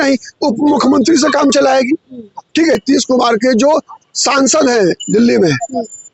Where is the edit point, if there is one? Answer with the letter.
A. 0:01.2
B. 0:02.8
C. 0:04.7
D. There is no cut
B